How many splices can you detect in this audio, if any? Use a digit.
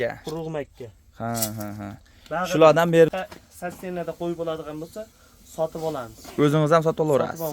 1